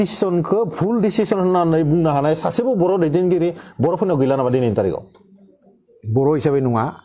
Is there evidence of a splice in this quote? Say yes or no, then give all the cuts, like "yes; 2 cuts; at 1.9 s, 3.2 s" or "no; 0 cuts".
no; 0 cuts